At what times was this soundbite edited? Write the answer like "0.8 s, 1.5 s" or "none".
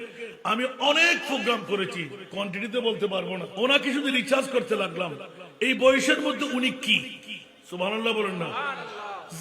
3.5 s